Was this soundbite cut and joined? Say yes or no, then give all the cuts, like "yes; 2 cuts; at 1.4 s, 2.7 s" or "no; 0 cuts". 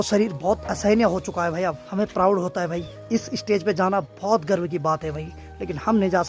yes; 2 cuts; at 1.8 s, 2.9 s